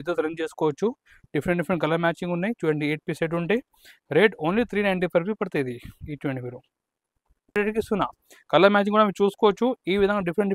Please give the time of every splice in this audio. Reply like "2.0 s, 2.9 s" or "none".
7.6 s